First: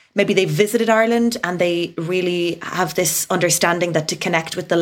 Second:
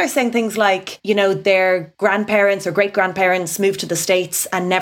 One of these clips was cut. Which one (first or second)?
second